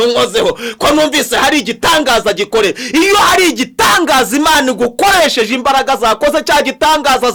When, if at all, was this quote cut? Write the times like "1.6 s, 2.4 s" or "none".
none